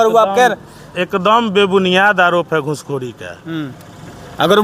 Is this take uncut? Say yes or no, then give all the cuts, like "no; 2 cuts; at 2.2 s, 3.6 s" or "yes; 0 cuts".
yes; 0 cuts